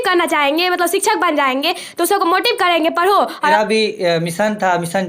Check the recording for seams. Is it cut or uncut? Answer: cut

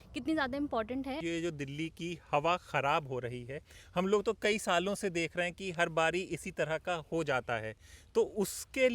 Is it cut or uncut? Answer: cut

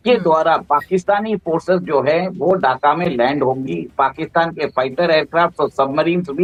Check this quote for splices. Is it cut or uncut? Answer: uncut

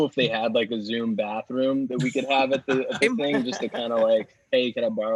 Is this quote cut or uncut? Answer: uncut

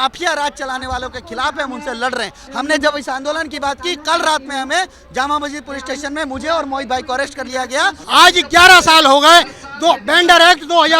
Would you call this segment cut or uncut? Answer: cut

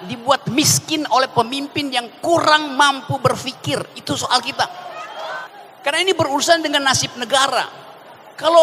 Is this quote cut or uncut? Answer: cut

